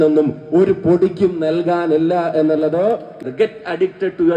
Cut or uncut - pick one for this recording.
cut